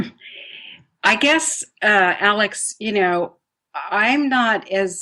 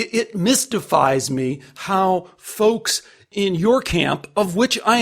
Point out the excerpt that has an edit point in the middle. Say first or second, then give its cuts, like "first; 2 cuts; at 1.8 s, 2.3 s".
second; 1 cut; at 3.3 s